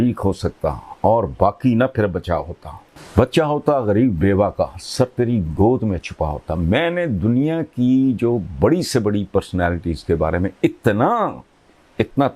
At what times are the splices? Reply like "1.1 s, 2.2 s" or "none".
none